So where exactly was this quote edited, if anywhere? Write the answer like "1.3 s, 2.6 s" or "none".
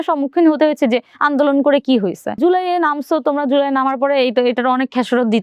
2.4 s